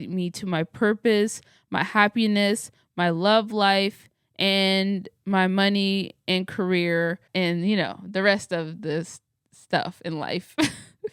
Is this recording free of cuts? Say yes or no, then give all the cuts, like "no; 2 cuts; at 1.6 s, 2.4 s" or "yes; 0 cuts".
yes; 0 cuts